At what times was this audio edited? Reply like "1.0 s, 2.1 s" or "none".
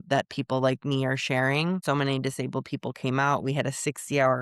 1.8 s